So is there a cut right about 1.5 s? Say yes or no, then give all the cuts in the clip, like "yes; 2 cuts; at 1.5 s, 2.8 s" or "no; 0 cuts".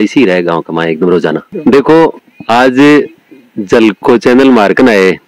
yes; 1 cut; at 1.5 s